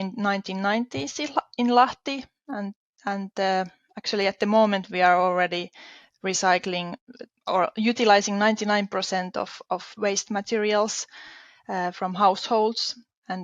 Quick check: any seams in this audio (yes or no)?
no